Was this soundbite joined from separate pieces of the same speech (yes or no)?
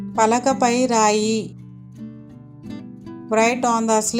no